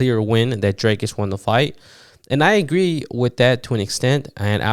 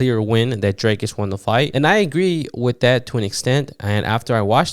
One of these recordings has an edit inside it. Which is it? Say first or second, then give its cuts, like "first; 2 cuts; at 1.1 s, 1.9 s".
second; 1 cut; at 1.7 s